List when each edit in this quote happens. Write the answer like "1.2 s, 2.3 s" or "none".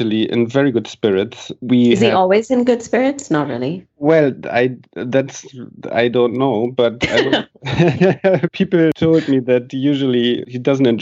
8.7 s